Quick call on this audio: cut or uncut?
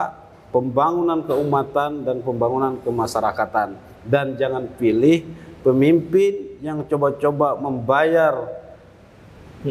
uncut